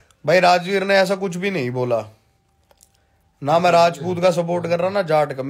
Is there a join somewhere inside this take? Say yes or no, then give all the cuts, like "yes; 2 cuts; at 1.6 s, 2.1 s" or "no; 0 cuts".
no; 0 cuts